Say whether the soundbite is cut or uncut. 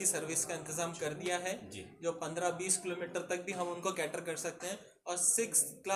uncut